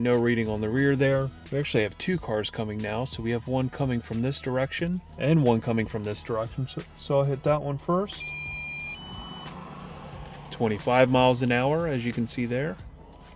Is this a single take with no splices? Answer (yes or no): no